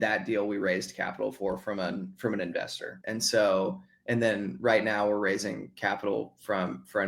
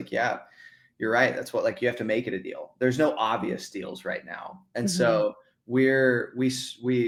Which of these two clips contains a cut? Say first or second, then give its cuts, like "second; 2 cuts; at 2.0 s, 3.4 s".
first; 1 cut; at 2.9 s